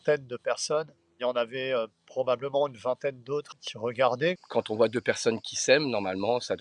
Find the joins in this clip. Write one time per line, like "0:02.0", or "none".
0:01.0
0:03.6
0:04.4